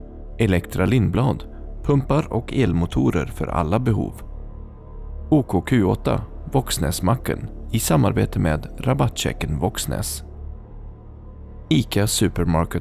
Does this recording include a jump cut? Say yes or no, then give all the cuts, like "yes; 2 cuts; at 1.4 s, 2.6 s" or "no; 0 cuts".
no; 0 cuts